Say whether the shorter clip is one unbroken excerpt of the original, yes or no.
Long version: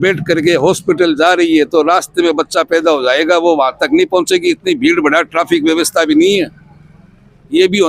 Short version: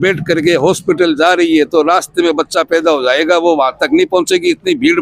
yes